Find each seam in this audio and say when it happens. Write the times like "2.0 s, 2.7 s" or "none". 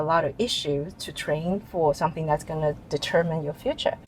none